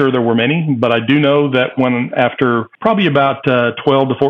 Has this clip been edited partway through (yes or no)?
yes